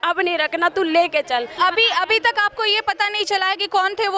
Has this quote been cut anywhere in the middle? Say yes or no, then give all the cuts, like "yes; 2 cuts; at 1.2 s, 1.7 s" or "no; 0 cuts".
yes; 1 cut; at 1.5 s